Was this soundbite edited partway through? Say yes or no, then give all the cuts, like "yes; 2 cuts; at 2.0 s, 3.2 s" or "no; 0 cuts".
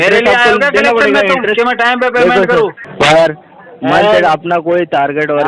yes; 1 cut; at 2.8 s